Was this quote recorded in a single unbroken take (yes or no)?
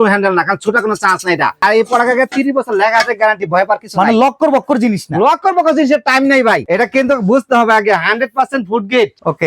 no